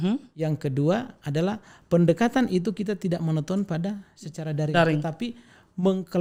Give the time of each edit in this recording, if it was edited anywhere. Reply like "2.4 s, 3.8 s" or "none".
none

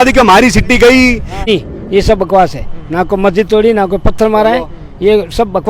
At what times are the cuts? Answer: 1.5 s

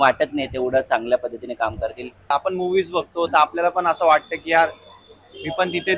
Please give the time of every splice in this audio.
2.3 s

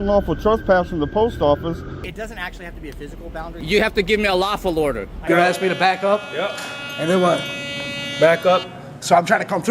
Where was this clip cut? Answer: 2.1 s, 3.6 s, 5.2 s

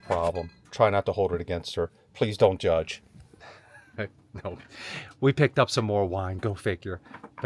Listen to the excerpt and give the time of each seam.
none

